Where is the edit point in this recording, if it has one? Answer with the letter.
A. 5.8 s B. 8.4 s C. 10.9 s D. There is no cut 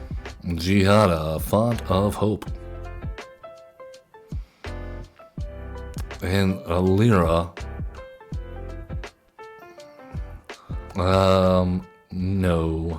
C